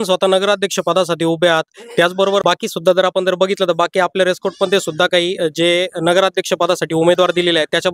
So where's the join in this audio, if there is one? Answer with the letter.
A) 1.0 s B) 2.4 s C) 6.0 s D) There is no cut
B